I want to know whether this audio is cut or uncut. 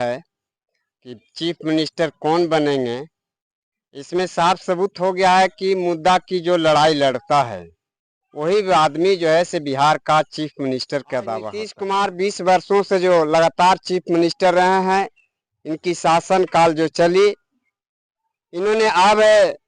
cut